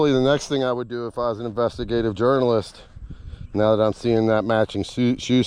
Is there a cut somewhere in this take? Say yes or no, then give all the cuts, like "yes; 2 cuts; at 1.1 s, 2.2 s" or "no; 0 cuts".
no; 0 cuts